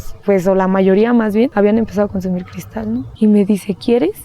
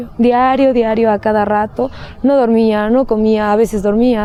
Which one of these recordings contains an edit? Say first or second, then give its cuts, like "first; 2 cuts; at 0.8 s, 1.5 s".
first; 2 cuts; at 1.5 s, 3.1 s